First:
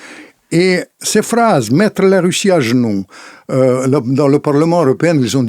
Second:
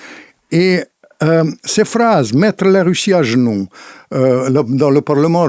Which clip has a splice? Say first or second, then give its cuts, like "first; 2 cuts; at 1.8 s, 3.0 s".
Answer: first; 1 cut; at 1.0 s